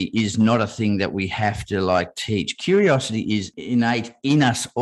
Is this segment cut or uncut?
cut